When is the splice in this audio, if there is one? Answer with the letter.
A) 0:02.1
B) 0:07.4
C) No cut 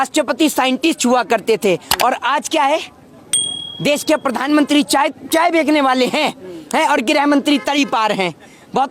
C